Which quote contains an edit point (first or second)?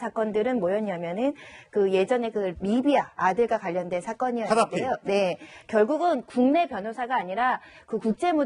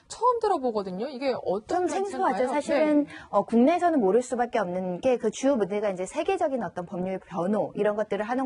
first